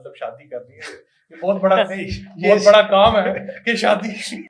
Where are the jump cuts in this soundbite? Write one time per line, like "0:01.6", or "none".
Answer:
none